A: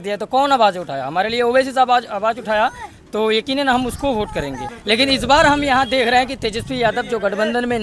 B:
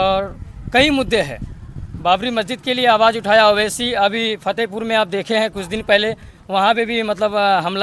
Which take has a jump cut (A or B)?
A